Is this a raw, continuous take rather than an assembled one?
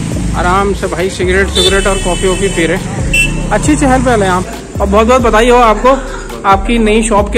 no; 1 cut; at 4.5 s

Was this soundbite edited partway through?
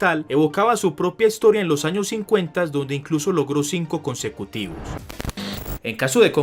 yes; 1 cut; at 5.2 s

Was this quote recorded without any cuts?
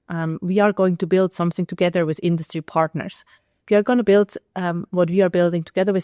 yes; 0 cuts

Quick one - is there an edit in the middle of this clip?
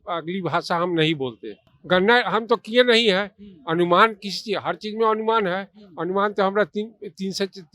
yes; 1 cut; at 1.7 s

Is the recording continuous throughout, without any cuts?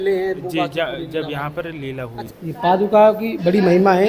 no; 1 cut; at 2.2 s

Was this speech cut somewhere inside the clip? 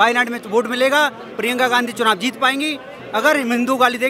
no; 0 cuts

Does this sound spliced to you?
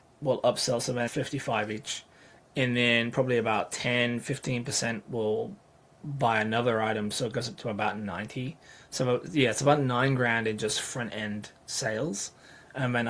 no; 0 cuts

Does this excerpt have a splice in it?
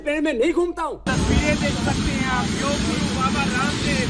yes; 1 cut; at 1.1 s

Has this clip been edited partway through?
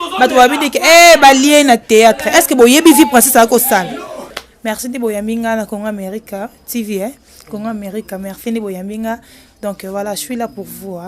yes; 1 cut; at 4.2 s

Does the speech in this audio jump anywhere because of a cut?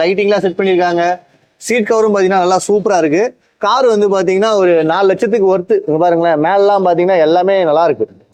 no; 0 cuts

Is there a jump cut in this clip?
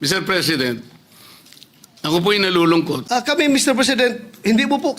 yes; 1 cut; at 3.0 s

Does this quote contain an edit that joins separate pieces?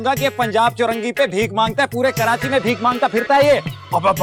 no; 0 cuts

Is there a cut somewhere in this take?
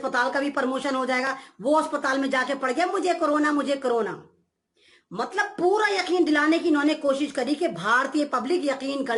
no; 0 cuts

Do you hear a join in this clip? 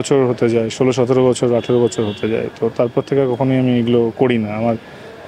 no; 0 cuts

